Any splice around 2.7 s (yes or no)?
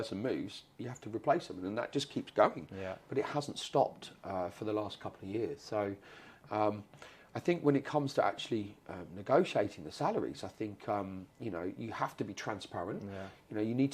no